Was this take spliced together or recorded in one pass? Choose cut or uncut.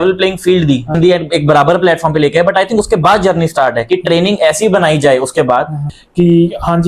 cut